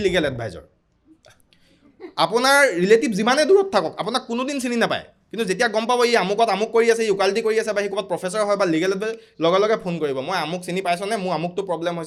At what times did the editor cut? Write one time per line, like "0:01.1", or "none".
none